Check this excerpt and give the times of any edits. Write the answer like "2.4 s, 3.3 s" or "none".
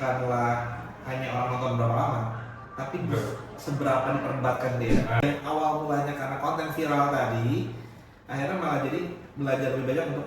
5.2 s